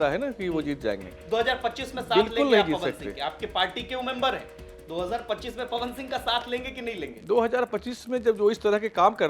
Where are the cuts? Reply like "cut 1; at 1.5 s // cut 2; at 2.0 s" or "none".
cut 1; at 1.1 s